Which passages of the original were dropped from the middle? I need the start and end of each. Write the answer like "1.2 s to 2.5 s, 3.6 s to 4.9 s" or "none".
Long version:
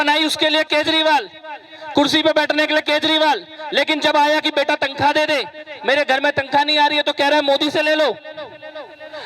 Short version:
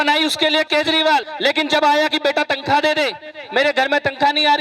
1.3 s to 3.6 s